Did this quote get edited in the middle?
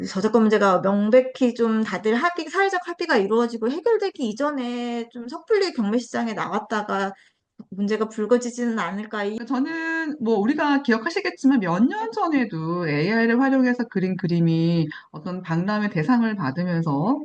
yes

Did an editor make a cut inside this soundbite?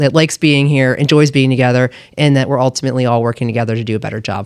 no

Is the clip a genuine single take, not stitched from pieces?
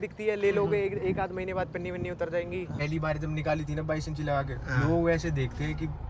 no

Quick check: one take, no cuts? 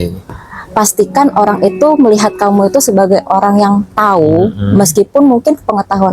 yes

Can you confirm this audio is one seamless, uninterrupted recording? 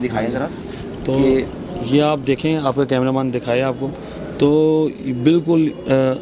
yes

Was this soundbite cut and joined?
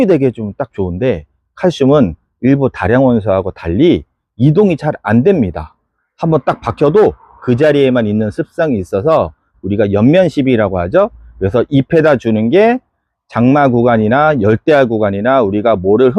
no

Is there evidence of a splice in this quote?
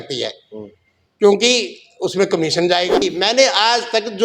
yes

